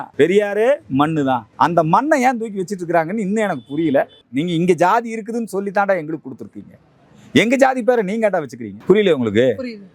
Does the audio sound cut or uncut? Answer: cut